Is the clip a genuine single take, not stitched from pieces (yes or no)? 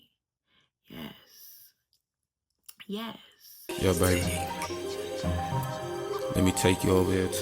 no